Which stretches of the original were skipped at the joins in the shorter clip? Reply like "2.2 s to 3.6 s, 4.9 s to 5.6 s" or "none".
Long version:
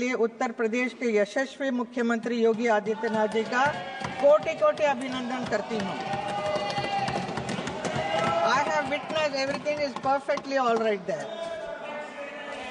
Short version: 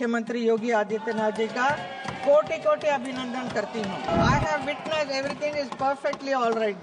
6.0 s to 8.3 s